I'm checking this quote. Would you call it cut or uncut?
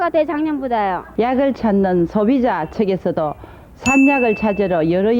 cut